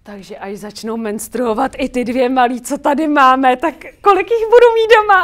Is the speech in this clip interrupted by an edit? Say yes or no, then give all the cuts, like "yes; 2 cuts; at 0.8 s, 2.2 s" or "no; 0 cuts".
no; 0 cuts